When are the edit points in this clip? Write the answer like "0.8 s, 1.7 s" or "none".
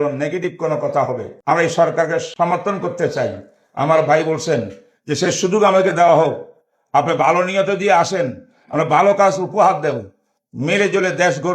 1.3 s, 2.3 s